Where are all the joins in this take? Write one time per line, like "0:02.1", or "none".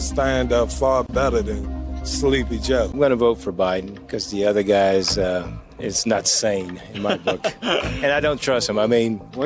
none